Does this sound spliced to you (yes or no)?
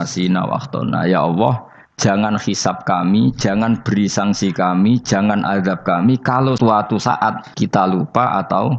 yes